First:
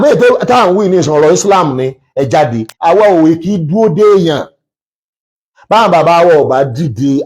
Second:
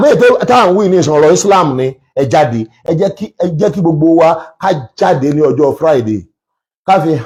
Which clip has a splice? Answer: first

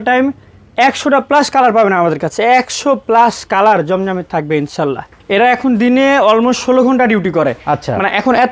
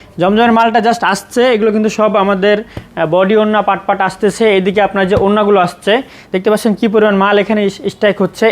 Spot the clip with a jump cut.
first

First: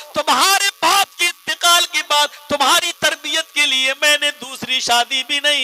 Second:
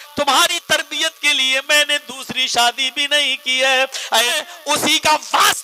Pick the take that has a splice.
second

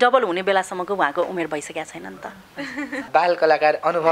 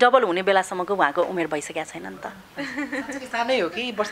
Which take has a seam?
first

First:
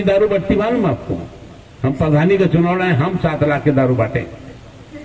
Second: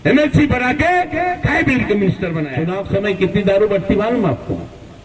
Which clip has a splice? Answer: second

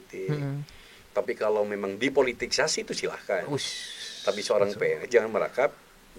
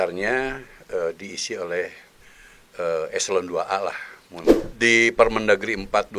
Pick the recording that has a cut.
second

